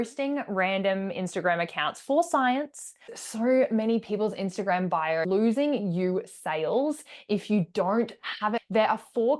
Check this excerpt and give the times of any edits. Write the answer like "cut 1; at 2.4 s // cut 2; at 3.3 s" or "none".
cut 1; at 3.2 s // cut 2; at 5.2 s // cut 3; at 8.6 s